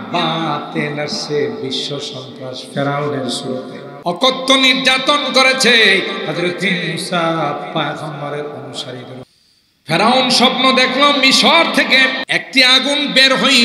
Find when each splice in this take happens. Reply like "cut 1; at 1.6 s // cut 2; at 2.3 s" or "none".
cut 1; at 3.8 s // cut 2; at 9.2 s // cut 3; at 12.2 s